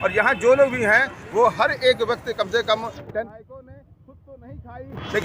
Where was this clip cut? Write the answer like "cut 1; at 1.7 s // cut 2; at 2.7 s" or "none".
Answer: cut 1; at 3.3 s